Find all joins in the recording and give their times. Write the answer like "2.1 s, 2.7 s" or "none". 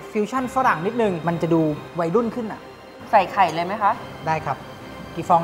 1.2 s, 2.9 s